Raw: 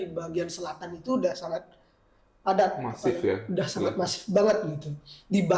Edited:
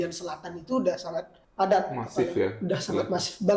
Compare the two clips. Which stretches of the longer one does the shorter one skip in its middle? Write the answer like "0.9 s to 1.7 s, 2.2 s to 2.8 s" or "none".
1.8 s to 2.3 s